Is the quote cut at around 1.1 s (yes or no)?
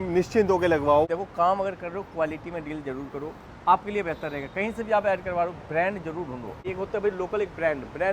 yes